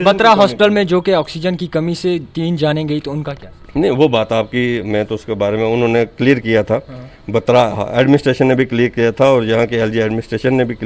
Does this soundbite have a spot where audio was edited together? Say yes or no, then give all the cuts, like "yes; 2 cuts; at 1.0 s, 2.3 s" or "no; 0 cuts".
no; 0 cuts